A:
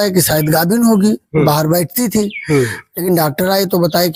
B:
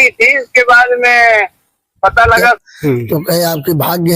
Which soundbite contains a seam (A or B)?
B